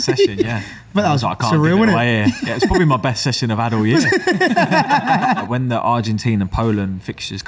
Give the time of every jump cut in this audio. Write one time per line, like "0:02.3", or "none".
0:05.4